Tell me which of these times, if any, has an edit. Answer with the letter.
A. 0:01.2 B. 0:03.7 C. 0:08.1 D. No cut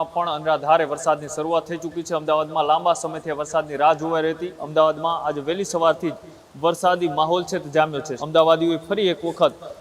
C